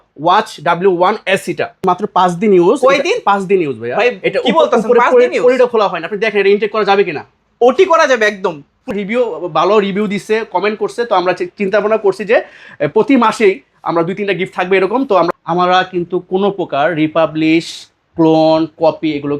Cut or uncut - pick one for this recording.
cut